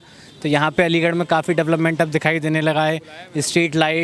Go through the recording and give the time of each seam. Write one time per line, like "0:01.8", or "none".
none